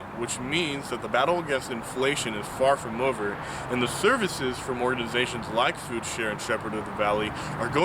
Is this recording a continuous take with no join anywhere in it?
yes; 0 cuts

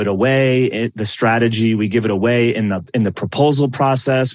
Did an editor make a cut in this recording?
no; 0 cuts

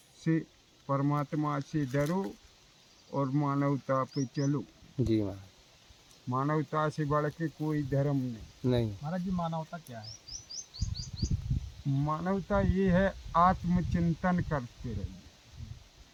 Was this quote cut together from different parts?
no; 0 cuts

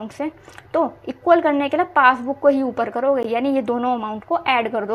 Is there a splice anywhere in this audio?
no; 0 cuts

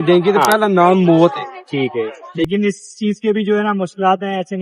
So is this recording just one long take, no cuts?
no; 1 cut; at 2.4 s

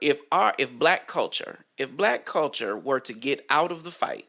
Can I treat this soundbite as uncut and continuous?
yes; 0 cuts

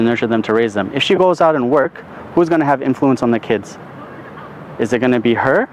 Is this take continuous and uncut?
yes; 0 cuts

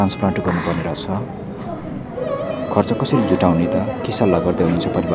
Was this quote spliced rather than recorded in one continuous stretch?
no; 0 cuts

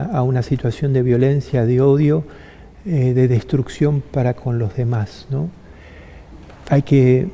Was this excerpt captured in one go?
yes; 0 cuts

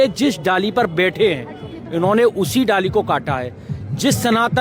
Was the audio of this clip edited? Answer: no; 0 cuts

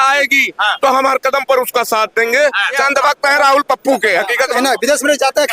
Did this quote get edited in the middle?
yes; 2 cuts; at 2.8 s, 4.6 s

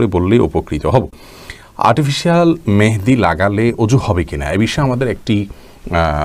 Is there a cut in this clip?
no; 0 cuts

